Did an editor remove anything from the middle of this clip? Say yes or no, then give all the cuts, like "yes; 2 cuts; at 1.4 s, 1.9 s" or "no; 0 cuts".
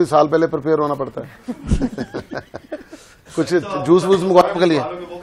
no; 0 cuts